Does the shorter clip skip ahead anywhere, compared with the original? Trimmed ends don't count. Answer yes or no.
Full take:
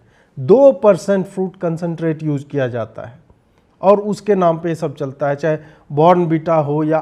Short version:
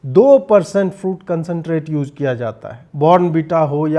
yes